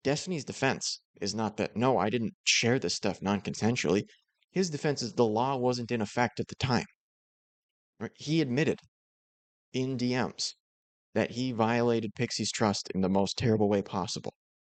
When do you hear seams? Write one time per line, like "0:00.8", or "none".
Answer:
none